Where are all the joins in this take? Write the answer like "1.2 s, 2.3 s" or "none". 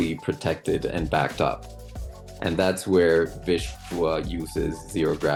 none